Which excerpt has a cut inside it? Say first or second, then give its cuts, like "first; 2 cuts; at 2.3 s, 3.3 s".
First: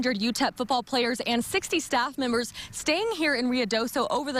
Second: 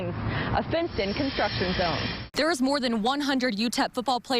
second; 1 cut; at 2.2 s